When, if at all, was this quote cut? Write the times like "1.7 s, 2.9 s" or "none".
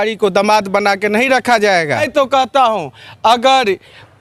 2.1 s